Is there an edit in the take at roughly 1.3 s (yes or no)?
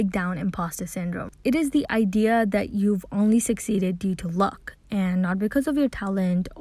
yes